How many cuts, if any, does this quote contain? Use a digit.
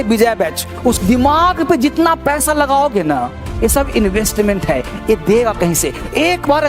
1